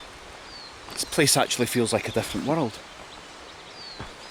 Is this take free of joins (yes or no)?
yes